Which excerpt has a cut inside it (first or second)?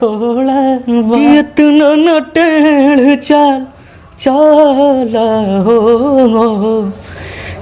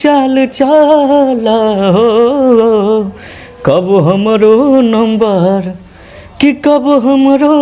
first